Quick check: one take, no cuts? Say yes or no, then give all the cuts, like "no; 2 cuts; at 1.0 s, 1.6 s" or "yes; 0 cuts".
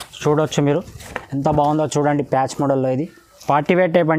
yes; 0 cuts